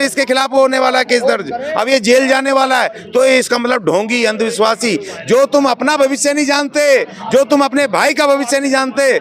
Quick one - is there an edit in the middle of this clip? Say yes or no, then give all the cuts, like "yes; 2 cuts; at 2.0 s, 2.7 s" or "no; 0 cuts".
no; 0 cuts